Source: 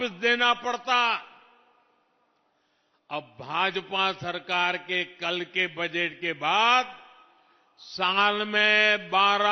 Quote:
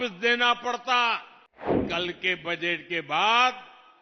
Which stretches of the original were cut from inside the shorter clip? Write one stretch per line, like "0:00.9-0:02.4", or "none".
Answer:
0:01.7-0:05.1